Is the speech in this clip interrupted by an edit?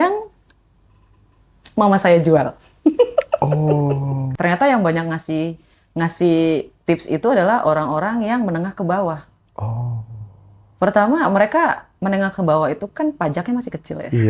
yes; 1 cut; at 4.2 s

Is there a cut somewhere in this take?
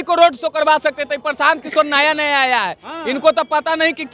no; 0 cuts

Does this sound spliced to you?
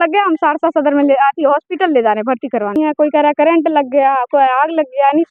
yes; 1 cut; at 2.8 s

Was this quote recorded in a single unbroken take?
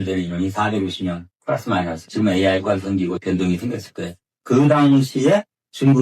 no; 1 cut; at 2.0 s

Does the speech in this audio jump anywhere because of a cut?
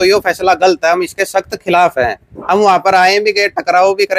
no; 0 cuts

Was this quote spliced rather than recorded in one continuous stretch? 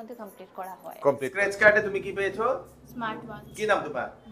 yes; 1 cut; at 1.3 s

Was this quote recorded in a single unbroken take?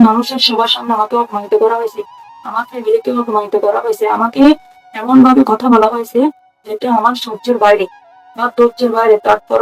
yes; 0 cuts

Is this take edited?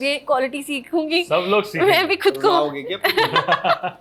no; 0 cuts

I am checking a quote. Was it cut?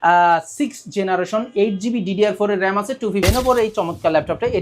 yes; 1 cut; at 3.2 s

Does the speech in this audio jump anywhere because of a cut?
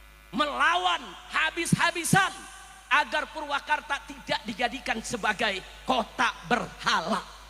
no; 0 cuts

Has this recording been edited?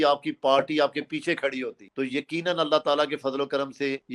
no; 0 cuts

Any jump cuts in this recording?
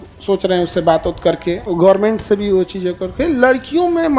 yes; 1 cut; at 1.6 s

